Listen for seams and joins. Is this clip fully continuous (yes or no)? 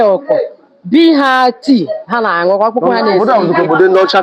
yes